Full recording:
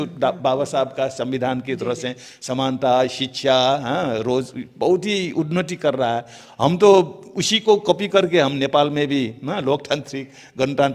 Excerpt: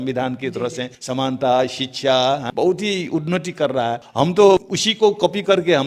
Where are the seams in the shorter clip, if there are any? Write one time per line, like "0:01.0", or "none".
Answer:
0:00.9
0:02.5
0:04.0
0:04.8